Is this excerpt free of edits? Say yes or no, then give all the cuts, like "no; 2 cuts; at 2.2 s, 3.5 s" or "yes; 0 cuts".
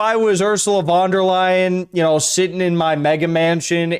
yes; 0 cuts